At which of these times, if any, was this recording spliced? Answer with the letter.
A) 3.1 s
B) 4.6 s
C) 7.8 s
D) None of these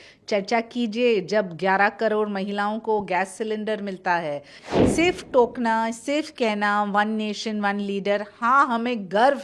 B